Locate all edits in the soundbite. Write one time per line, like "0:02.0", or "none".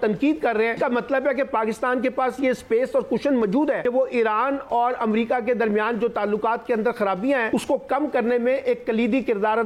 0:00.8
0:03.8
0:07.5